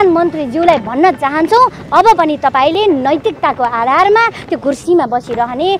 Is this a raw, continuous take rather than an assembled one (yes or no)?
yes